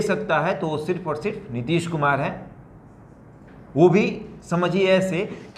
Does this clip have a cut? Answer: no; 0 cuts

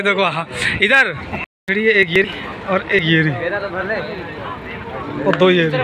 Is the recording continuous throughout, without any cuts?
no; 1 cut; at 1.4 s

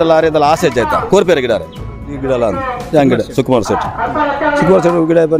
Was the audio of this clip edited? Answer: yes; 1 cut; at 2.1 s

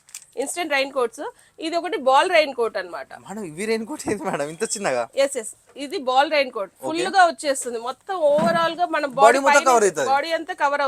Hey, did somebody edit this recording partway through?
no; 0 cuts

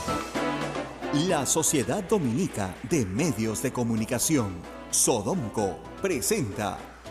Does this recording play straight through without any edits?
no; 1 cut; at 0.9 s

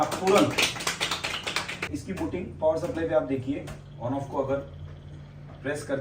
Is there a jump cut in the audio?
yes; 1 cut; at 1.9 s

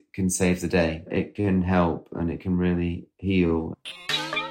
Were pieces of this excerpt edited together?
yes; 2 cuts; at 1.2 s, 3.6 s

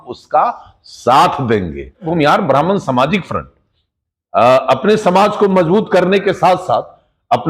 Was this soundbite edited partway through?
yes; 1 cut; at 2.1 s

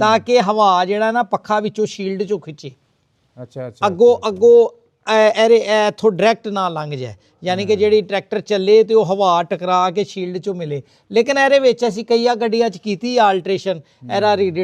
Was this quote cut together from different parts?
no; 0 cuts

